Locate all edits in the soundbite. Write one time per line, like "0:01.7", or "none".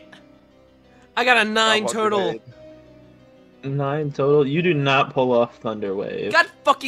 none